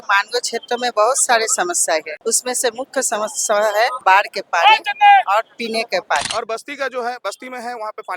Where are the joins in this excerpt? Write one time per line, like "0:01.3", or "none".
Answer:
0:02.1
0:04.0
0:06.3